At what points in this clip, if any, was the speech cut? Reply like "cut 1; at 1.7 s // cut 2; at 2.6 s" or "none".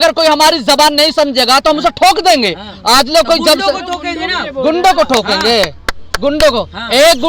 none

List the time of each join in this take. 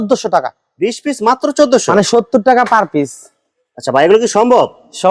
none

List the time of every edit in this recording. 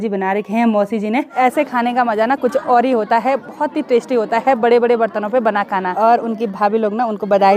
cut 1; at 1.3 s // cut 2; at 5.9 s

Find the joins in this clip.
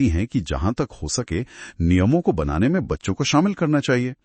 none

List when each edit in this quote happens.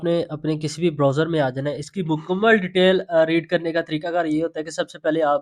none

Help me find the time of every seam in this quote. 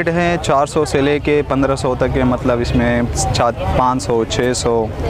none

